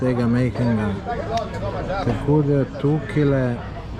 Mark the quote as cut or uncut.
uncut